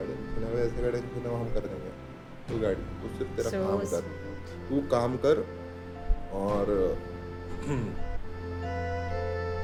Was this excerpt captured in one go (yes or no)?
yes